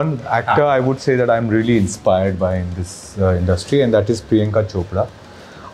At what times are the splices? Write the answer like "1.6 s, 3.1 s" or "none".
none